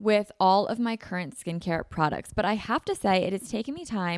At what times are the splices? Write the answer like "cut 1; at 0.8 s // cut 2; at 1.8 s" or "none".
none